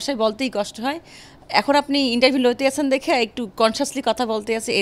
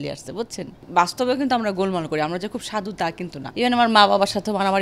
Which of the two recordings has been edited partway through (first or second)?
second